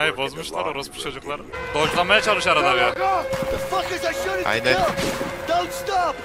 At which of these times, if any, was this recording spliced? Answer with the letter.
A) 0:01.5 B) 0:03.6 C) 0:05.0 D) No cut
A